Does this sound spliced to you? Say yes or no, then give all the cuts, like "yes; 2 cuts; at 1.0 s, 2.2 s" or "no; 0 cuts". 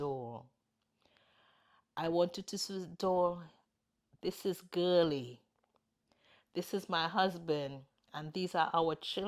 no; 0 cuts